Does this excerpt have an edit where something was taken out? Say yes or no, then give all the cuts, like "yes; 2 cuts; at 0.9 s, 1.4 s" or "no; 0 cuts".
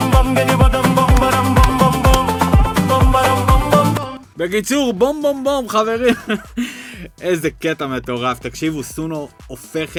no; 0 cuts